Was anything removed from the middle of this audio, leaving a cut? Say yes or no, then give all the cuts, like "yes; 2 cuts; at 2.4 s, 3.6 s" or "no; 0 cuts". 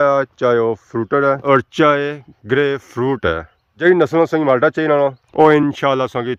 no; 0 cuts